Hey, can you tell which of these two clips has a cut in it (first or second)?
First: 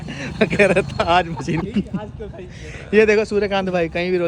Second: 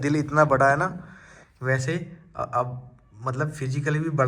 first